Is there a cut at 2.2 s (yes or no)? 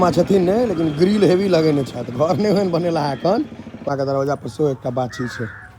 no